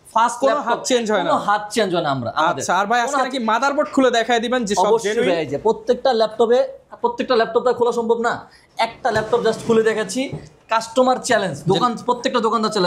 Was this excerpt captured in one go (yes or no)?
yes